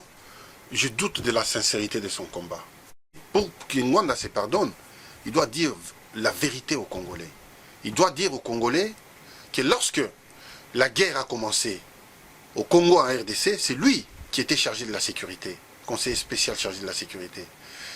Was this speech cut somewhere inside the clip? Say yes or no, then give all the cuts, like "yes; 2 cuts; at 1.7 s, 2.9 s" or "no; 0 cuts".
yes; 1 cut; at 3.1 s